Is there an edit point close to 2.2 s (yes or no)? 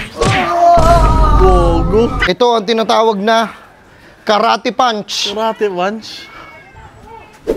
yes